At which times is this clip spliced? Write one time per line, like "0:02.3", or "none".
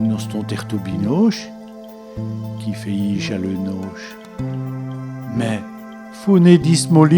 0:01.4
0:02.6